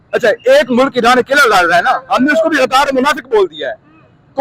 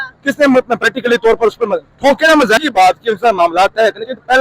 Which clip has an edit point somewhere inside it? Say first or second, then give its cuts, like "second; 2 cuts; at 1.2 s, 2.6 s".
second; 1 cut; at 2.6 s